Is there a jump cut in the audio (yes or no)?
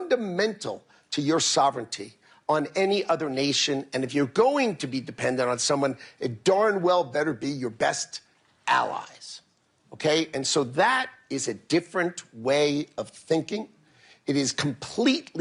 no